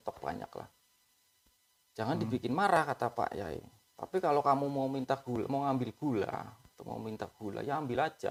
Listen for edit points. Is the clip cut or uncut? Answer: uncut